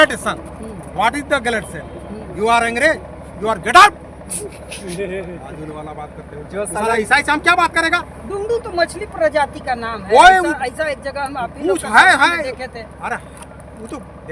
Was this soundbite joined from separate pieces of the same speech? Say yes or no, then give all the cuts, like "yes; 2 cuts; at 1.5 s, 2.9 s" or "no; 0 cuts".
no; 0 cuts